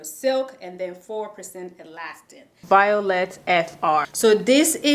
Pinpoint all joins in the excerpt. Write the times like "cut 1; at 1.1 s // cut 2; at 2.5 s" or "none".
cut 1; at 2.7 s // cut 2; at 4.1 s